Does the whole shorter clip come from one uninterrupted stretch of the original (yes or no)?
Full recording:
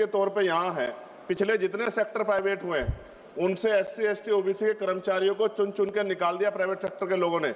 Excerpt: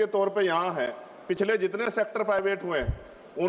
yes